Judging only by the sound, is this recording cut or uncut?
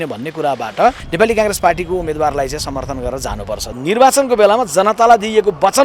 cut